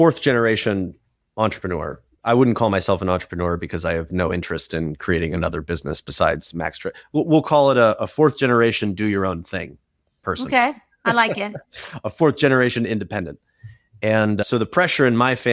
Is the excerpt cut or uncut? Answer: cut